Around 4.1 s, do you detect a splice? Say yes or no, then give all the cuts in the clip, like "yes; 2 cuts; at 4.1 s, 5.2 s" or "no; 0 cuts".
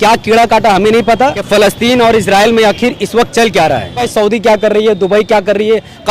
yes; 2 cuts; at 1.4 s, 4.1 s